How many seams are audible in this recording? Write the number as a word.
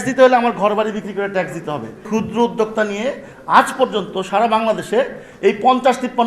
one